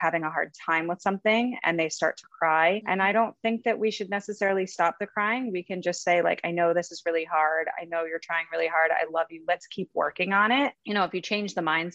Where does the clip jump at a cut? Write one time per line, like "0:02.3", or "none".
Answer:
0:02.8
0:10.8